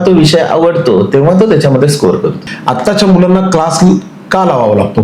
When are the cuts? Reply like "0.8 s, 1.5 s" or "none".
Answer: 2.5 s